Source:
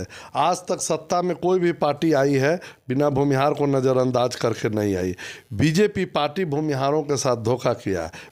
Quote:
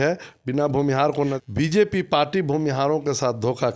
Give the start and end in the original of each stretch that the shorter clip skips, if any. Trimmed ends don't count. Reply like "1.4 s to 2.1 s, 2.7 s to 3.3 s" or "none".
3.8 s to 5.4 s